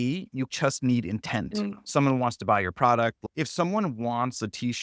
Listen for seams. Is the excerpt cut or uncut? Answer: uncut